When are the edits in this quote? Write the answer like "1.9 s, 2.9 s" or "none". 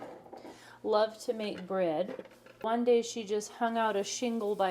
2.6 s